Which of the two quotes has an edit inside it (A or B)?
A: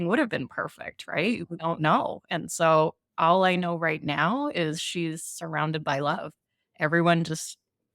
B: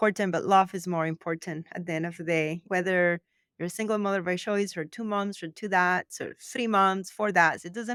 A